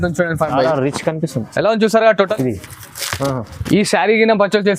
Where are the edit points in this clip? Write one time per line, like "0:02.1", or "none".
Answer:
0:02.3